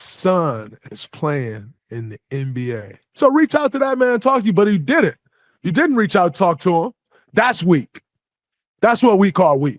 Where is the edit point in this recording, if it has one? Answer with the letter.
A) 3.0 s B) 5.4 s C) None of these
A